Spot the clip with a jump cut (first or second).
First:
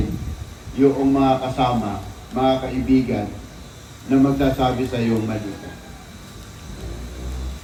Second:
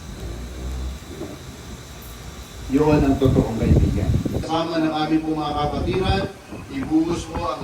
second